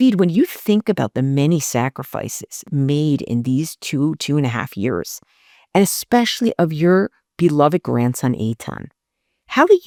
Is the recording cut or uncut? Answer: uncut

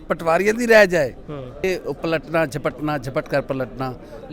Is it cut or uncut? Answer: cut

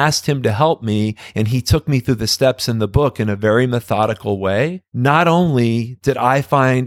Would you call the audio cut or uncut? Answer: cut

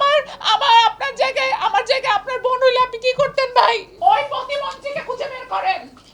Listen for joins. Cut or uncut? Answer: cut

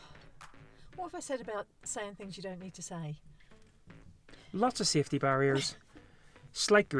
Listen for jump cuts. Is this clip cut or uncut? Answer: uncut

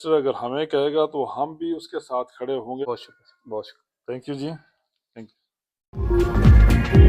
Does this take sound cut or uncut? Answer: uncut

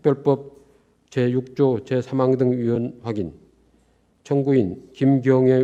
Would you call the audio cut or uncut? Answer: uncut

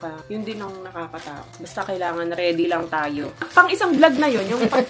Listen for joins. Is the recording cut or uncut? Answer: cut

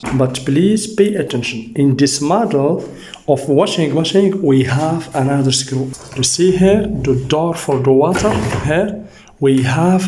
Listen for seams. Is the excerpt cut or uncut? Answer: uncut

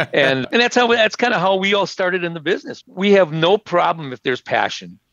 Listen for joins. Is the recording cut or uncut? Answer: cut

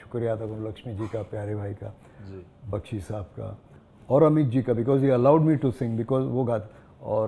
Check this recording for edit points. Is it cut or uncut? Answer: uncut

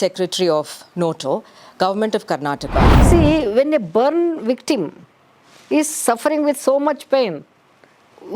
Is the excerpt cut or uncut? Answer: cut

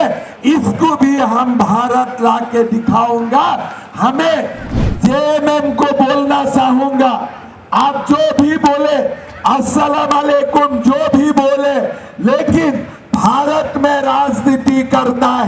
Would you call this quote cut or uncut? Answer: cut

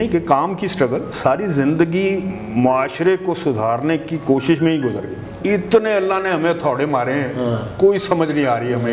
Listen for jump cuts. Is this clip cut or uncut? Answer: cut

